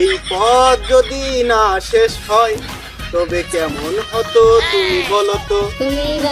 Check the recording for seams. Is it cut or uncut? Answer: uncut